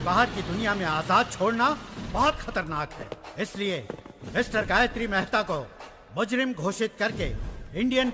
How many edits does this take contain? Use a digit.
0